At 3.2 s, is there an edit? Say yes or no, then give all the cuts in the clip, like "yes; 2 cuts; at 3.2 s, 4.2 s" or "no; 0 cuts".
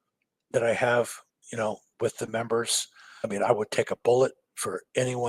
yes; 1 cut; at 3.2 s